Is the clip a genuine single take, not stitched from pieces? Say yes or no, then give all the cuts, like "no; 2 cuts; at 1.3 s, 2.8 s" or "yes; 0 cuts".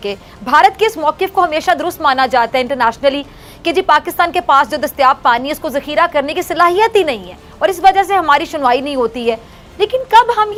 yes; 0 cuts